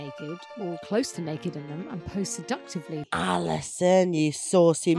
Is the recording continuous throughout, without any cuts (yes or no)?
no